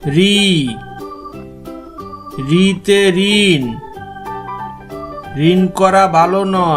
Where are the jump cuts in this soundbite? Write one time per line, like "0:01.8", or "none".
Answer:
0:03.8
0:05.3